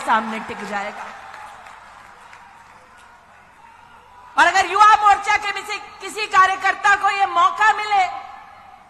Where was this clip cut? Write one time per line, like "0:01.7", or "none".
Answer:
none